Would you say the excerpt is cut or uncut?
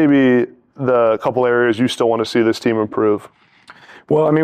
uncut